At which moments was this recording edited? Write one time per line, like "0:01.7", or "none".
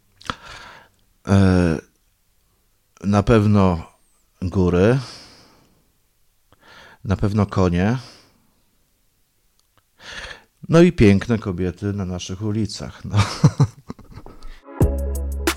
0:14.7